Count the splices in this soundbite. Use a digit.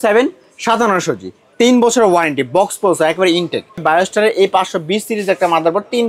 1